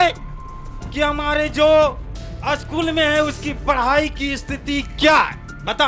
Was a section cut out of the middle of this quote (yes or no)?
no